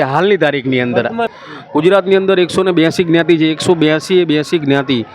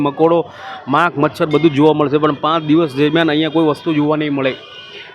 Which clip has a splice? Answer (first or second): first